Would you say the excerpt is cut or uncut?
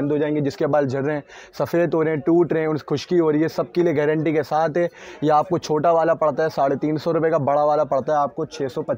uncut